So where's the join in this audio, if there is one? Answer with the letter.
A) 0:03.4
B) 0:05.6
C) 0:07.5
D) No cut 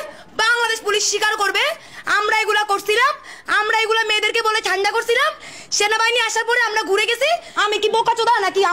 C